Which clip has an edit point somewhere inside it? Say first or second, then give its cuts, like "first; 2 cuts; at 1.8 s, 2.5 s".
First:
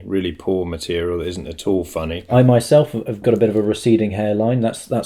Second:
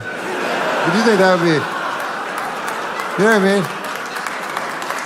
first; 1 cut; at 2.2 s